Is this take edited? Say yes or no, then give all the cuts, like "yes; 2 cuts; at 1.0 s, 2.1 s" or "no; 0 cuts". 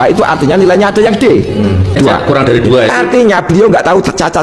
yes; 1 cut; at 2.0 s